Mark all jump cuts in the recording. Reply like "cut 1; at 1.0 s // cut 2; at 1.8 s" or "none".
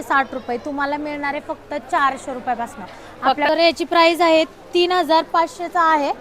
cut 1; at 3.5 s